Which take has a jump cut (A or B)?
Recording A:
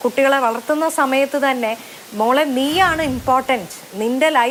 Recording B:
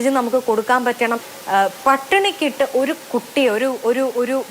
B